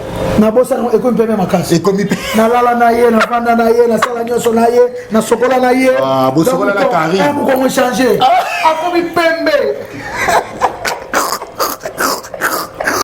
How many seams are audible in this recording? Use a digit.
0